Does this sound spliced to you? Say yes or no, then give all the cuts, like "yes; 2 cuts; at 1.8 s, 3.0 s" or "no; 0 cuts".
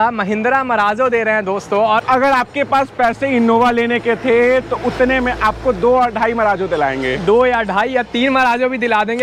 yes; 1 cut; at 2.0 s